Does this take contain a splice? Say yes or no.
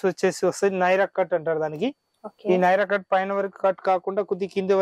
no